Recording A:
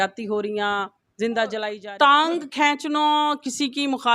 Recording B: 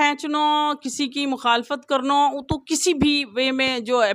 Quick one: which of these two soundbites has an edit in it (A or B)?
A